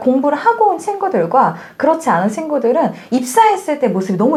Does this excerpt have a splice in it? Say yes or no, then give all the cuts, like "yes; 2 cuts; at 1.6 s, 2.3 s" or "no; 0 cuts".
no; 0 cuts